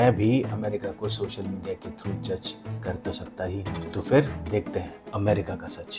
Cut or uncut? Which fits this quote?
uncut